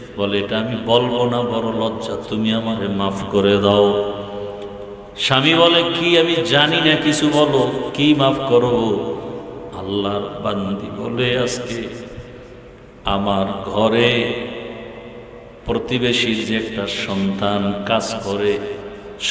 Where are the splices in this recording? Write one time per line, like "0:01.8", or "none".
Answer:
none